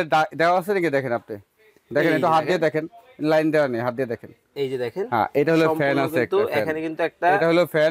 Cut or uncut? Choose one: uncut